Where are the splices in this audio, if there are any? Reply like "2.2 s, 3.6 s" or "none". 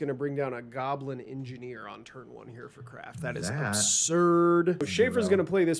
4.9 s